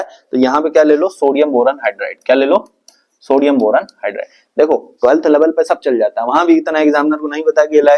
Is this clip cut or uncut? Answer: uncut